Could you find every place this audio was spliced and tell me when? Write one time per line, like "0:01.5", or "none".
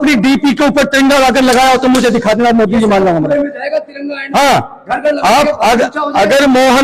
none